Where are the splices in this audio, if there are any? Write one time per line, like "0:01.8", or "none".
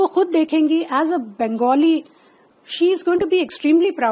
none

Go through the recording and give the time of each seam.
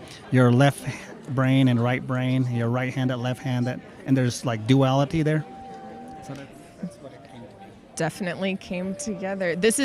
0:03.2

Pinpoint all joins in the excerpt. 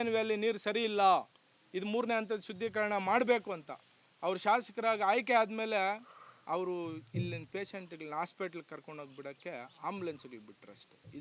none

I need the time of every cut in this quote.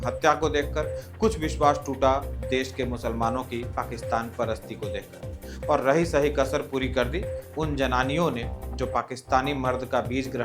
none

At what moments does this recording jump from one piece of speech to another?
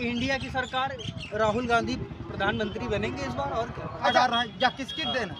0:04.0

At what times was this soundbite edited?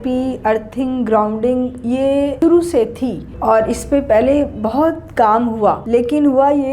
0:02.3
0:03.3
0:05.8

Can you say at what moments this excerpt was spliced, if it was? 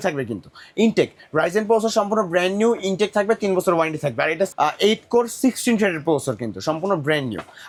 none

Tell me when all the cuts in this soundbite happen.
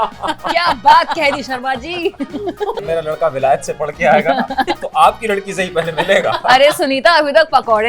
0:02.8

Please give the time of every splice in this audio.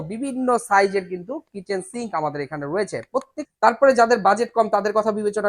0:03.4

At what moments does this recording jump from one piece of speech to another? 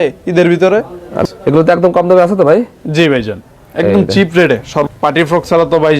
0:01.1
0:04.9

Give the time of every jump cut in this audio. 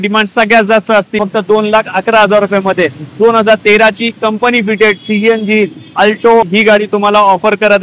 0:01.1
0:06.5

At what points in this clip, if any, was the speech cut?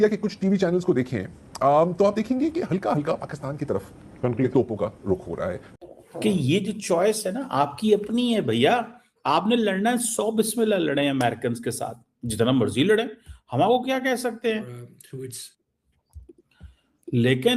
0:05.6

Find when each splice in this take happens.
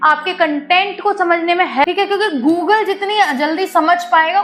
0:01.8

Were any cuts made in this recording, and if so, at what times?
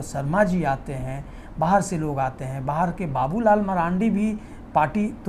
none

